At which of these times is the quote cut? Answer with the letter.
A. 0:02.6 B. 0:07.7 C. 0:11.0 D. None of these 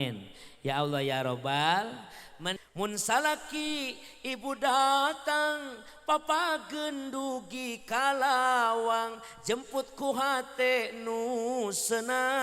A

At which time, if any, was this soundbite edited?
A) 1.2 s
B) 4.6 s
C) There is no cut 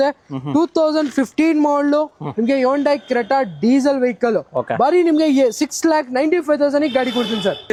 C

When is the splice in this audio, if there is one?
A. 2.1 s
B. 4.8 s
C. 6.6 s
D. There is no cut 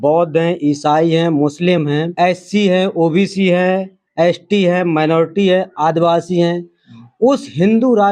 A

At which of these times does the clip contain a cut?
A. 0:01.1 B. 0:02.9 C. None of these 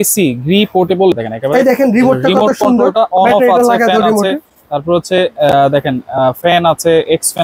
A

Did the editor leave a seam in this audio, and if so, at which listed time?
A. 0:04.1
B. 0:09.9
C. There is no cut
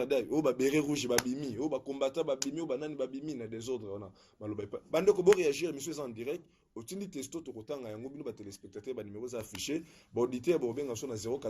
C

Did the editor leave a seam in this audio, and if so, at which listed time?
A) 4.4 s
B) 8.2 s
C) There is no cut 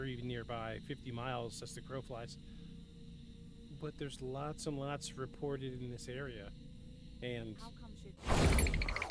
B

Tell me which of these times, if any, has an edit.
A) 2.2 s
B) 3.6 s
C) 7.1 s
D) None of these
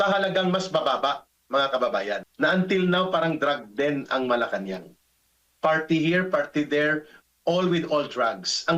A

